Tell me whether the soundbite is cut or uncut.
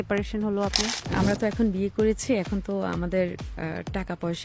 cut